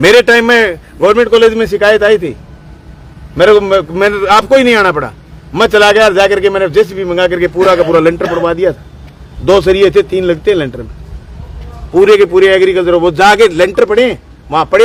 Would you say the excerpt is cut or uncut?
uncut